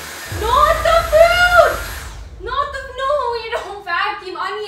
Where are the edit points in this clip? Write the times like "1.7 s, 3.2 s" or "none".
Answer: none